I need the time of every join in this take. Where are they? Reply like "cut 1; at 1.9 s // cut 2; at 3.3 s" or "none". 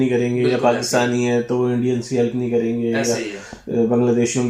none